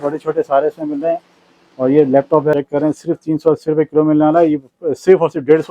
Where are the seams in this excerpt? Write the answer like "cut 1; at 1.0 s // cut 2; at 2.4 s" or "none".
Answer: cut 1; at 2.5 s